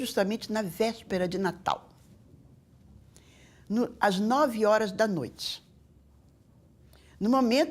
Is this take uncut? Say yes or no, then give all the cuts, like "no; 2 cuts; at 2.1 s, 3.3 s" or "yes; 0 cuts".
yes; 0 cuts